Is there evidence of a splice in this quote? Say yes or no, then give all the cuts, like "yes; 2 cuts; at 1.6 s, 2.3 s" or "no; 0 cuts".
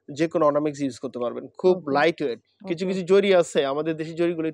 no; 0 cuts